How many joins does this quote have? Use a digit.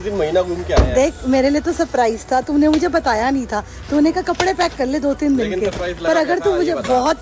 0